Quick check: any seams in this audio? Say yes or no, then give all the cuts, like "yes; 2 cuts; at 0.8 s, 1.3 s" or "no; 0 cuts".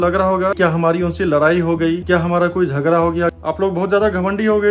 yes; 1 cut; at 3.4 s